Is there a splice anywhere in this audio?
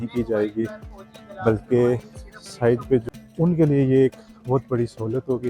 yes; 1 cut; at 3.0 s

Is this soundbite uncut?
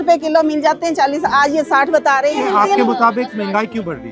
yes; 0 cuts

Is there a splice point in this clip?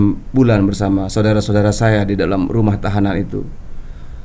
no; 0 cuts

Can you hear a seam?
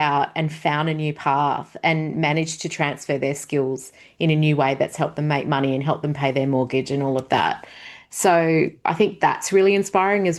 no; 0 cuts

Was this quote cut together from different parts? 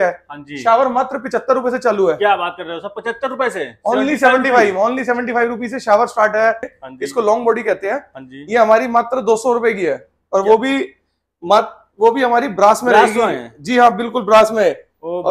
yes; 1 cut; at 6.7 s

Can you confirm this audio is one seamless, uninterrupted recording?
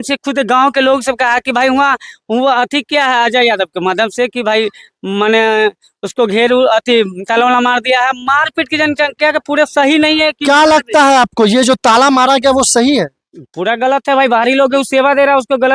yes; 0 cuts

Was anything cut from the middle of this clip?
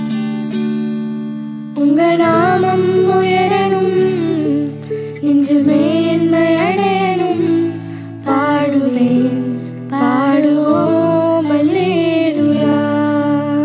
no; 0 cuts

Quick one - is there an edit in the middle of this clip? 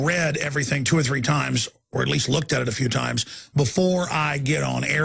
yes; 1 cut; at 2.4 s

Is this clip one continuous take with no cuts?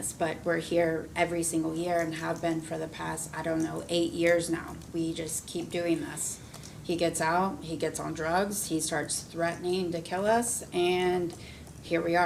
yes; 0 cuts

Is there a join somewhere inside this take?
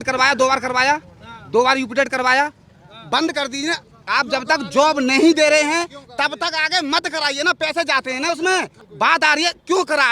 yes; 1 cut; at 8.8 s

